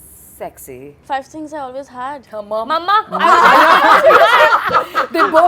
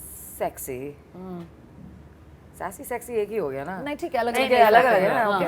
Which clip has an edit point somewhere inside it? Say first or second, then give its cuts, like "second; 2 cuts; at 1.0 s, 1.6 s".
first; 1 cut; at 0.9 s